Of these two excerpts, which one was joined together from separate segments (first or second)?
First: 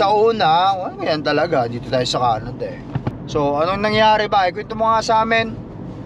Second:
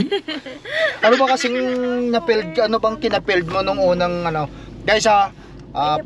first